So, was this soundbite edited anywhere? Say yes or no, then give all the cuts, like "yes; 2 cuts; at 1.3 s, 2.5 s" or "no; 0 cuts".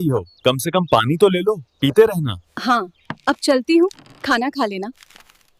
no; 0 cuts